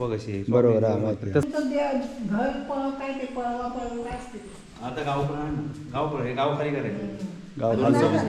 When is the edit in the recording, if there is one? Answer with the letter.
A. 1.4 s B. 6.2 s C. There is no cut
A